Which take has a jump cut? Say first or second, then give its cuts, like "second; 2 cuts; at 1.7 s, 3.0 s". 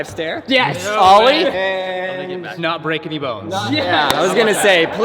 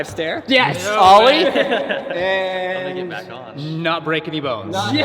first; 2 cuts; at 1.5 s, 2.6 s